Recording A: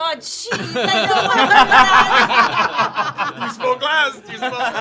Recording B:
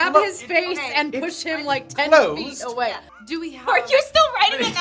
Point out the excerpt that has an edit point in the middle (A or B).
B